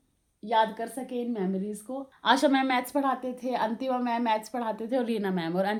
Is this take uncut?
yes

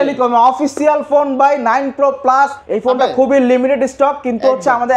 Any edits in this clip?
yes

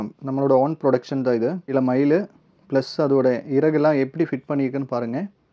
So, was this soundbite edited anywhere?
yes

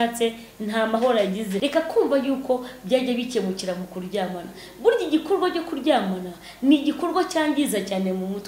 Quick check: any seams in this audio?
yes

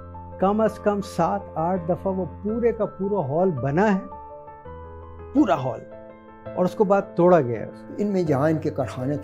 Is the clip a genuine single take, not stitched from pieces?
no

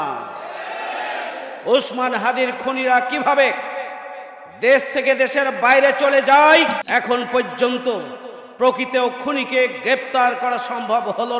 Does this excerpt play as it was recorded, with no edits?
no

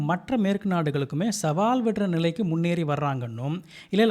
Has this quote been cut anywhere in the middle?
no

